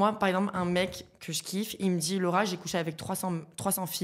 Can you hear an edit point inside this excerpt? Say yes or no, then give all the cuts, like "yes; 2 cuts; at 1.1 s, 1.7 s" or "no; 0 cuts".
no; 0 cuts